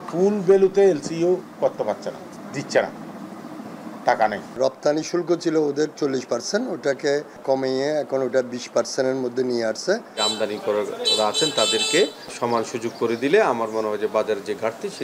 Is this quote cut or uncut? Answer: cut